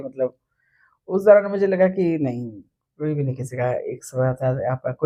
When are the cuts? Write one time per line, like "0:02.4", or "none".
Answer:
none